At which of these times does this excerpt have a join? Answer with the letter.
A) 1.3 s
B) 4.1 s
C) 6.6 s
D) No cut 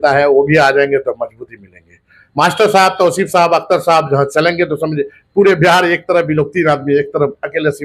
D